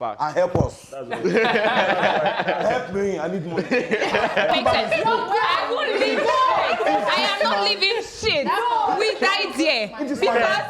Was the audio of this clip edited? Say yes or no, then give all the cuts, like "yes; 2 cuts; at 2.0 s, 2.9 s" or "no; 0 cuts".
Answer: yes; 1 cut; at 4.5 s